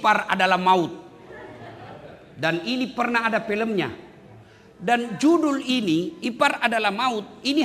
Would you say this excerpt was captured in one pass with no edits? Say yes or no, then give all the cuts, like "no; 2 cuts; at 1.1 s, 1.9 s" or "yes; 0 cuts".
yes; 0 cuts